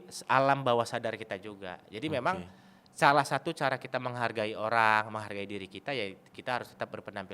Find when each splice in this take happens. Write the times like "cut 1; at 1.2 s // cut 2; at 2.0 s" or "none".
none